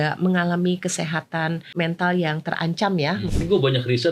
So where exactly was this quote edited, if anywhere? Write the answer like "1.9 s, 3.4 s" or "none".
1.7 s, 3.3 s